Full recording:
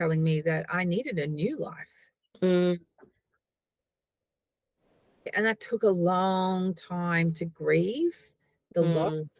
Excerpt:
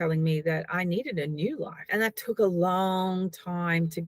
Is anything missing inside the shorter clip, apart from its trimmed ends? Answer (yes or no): yes